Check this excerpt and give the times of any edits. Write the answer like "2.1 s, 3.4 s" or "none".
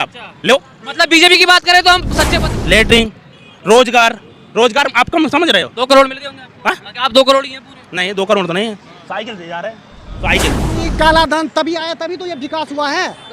2.2 s, 10.8 s